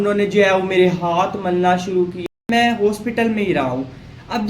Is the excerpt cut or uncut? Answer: cut